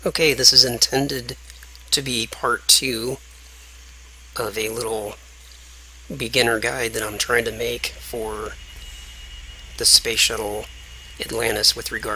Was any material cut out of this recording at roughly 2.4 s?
no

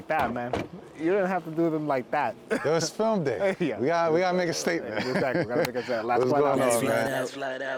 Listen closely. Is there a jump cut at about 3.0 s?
no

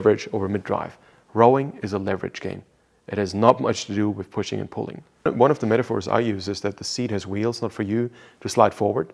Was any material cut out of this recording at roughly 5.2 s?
yes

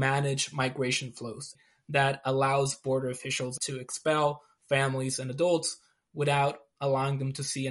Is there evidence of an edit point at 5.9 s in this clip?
no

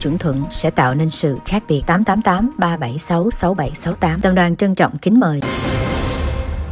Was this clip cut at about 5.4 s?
yes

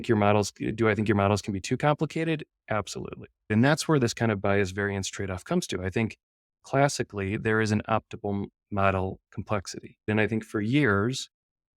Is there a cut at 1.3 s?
no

